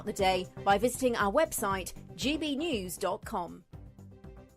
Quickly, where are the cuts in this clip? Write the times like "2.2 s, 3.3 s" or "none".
3.7 s